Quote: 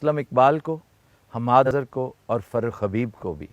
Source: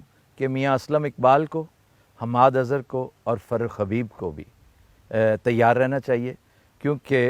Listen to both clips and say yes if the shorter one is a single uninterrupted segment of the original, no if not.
no